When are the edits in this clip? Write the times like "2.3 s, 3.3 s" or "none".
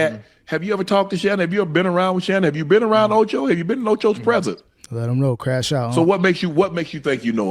none